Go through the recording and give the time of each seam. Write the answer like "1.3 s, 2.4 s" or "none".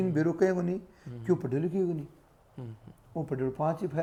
none